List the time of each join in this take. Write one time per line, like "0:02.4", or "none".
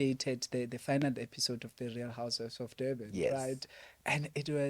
none